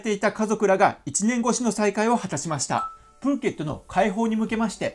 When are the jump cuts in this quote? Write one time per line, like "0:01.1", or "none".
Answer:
0:03.0

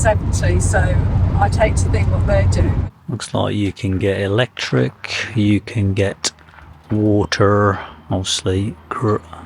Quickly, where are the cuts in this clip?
0:02.8

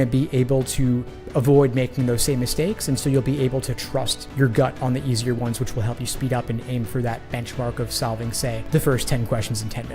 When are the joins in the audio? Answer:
0:08.6

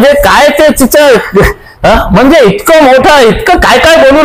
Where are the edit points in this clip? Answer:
none

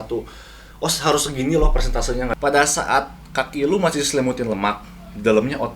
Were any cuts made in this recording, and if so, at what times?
0:02.3

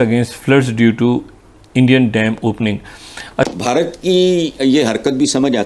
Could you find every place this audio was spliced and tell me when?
0:03.3

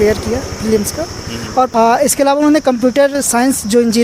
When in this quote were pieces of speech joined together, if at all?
0:01.7

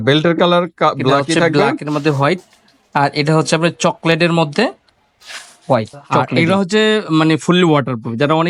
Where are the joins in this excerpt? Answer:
0:01.5
0:06.3

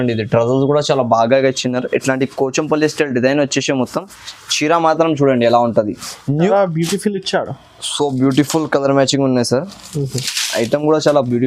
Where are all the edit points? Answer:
0:06.5

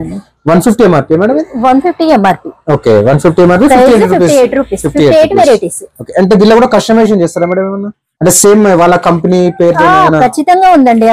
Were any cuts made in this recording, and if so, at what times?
none

